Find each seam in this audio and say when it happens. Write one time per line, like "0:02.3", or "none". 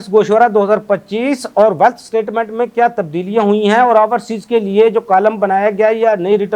none